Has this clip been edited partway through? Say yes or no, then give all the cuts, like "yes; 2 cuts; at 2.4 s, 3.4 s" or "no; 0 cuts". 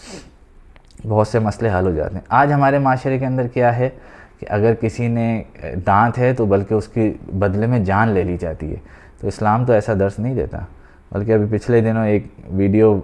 no; 0 cuts